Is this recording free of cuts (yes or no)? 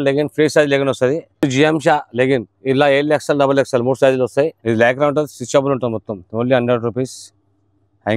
no